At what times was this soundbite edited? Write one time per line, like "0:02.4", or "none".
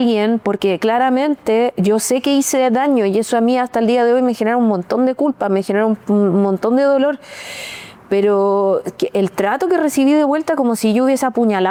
none

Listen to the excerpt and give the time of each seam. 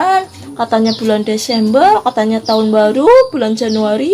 none

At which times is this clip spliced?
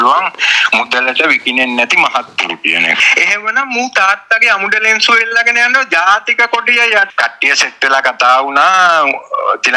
0:03.0
0:07.1

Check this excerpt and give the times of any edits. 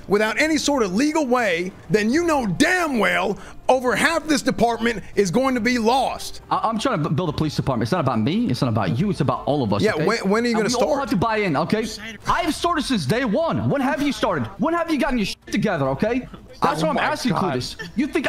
0:06.3

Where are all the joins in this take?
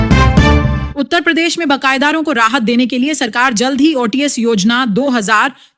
0:00.9

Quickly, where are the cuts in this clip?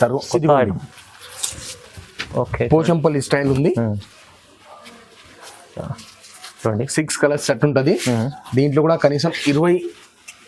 none

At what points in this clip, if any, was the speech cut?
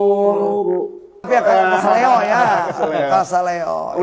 0:01.3

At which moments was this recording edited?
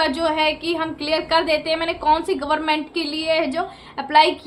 none

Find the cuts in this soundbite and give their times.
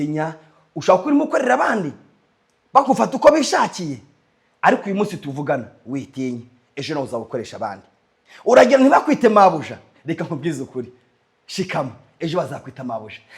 none

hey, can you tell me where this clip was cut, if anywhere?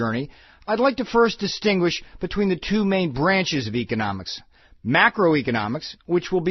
0:04.2

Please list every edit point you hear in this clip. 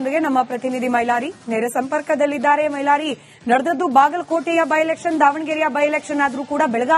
none

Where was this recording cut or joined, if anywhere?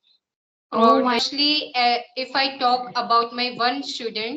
0:01.3

